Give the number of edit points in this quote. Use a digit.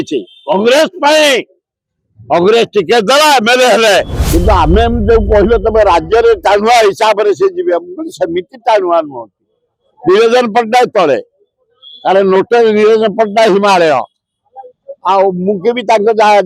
1